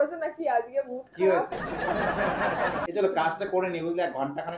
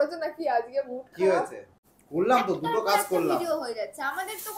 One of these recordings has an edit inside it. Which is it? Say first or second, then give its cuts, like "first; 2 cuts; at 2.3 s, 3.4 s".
second; 1 cut; at 1.8 s